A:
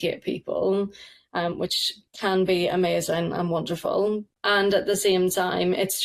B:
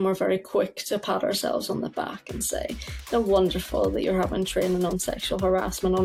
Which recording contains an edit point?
A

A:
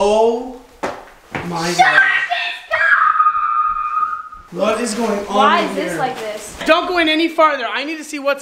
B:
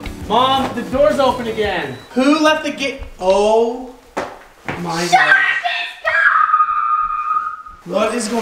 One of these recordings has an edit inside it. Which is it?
A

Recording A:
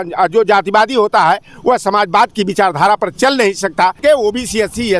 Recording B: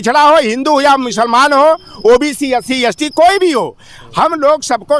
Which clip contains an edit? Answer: A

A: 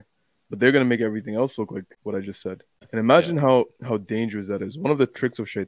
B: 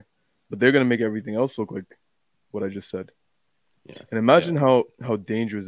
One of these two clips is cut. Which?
A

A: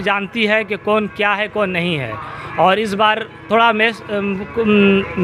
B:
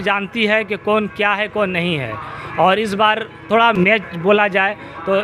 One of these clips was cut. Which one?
B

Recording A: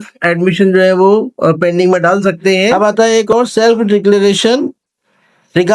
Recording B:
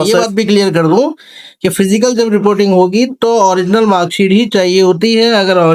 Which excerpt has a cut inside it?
A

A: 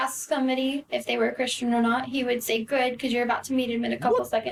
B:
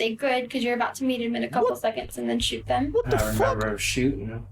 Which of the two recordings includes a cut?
B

